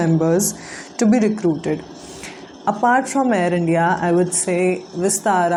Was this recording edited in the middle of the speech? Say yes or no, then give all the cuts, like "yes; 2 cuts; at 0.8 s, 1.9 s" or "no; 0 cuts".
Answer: no; 0 cuts